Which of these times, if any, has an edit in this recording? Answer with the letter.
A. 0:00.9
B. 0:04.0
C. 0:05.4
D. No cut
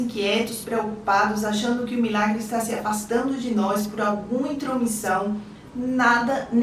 C